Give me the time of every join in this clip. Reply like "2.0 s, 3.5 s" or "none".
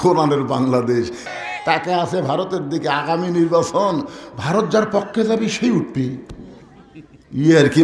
1.2 s